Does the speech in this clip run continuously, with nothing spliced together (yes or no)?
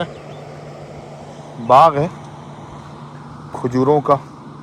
yes